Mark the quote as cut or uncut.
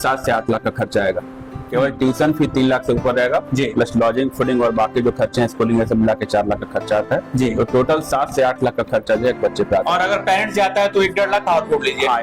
cut